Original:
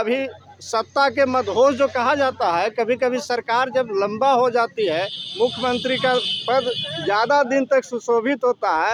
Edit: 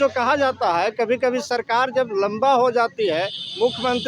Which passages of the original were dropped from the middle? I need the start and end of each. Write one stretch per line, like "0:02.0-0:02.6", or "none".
none